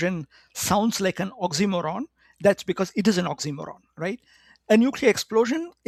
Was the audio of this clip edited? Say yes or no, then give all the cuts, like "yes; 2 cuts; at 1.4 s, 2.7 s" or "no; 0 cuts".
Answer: no; 0 cuts